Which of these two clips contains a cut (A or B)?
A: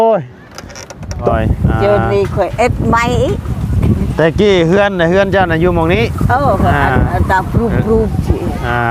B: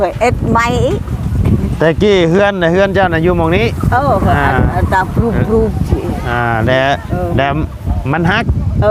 A